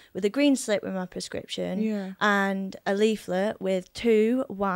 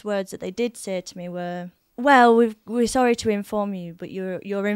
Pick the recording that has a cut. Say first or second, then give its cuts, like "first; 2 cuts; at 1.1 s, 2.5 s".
second; 1 cut; at 1.8 s